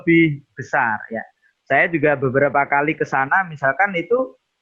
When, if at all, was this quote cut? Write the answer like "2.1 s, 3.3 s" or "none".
none